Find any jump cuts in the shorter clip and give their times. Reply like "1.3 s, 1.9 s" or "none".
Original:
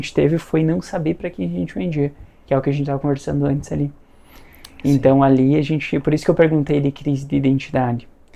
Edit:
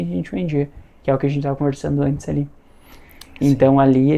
none